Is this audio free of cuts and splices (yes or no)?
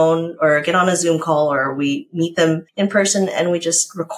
no